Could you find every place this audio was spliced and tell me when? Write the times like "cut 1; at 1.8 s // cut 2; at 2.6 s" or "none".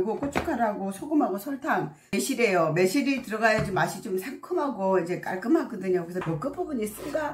cut 1; at 2.1 s // cut 2; at 6.2 s